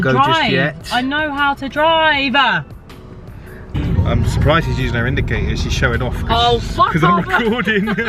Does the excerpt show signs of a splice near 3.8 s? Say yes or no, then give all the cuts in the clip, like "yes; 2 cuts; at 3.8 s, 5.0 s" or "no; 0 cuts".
yes; 1 cut; at 3.8 s